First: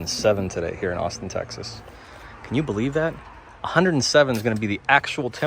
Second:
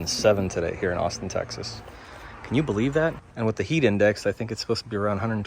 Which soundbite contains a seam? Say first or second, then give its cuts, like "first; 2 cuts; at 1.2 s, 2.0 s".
second; 1 cut; at 3.3 s